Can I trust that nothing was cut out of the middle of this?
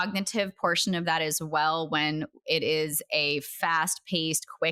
yes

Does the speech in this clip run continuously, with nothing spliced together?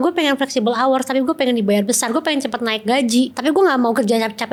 yes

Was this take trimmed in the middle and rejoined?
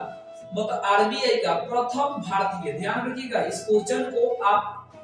no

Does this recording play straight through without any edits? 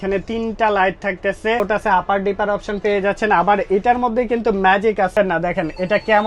no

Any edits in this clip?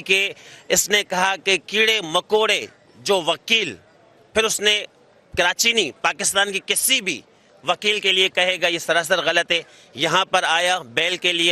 no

